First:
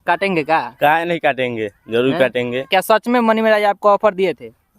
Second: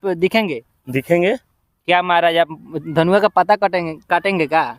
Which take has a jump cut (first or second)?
first